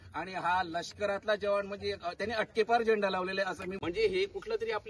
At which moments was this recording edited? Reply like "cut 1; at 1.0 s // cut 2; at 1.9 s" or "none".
cut 1; at 3.7 s